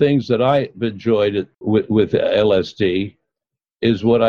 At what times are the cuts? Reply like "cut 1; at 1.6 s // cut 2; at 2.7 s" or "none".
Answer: cut 1; at 1.5 s

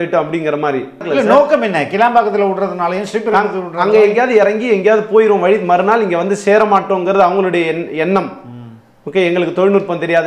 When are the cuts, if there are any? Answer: cut 1; at 1.1 s

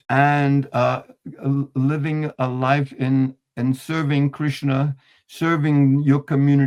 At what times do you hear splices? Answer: none

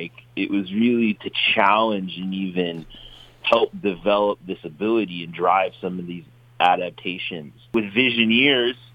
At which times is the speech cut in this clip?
cut 1; at 7.7 s

